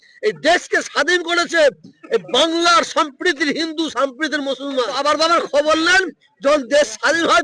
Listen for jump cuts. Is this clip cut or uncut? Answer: cut